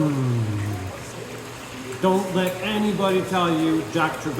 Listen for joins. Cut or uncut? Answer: cut